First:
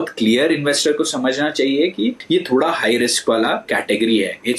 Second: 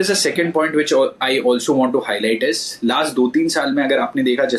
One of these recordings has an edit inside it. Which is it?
first; 2 cuts; at 2.2 s, 3.6 s

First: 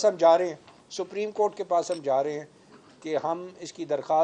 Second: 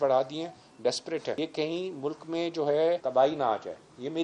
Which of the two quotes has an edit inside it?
second; 2 cuts; at 1.4 s, 3.0 s

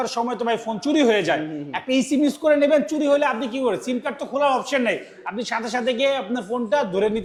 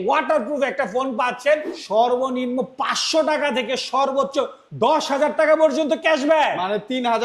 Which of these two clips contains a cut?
second; 2 cuts; at 1.8 s, 4.6 s

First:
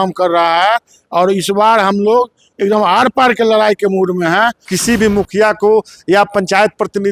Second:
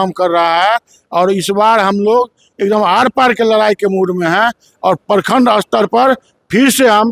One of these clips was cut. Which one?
first; 1 cut; at 4.7 s

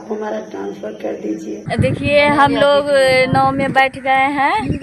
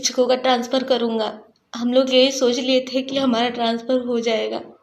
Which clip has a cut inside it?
first; 1 cut; at 1.6 s

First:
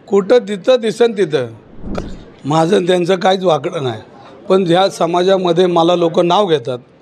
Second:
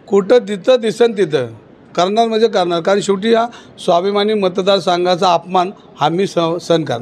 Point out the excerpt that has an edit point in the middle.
first; 1 cut; at 1.9 s

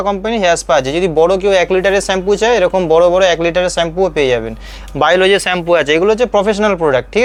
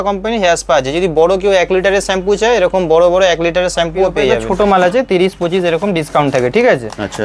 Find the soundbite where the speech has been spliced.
second; 1 cut; at 4.5 s

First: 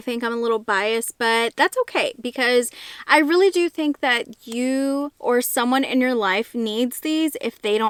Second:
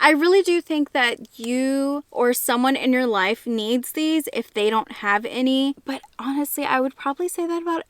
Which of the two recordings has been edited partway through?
second; 1 cut; at 5.8 s

